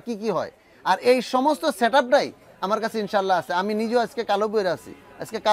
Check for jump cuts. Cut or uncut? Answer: uncut